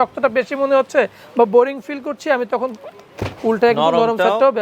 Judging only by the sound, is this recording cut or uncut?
uncut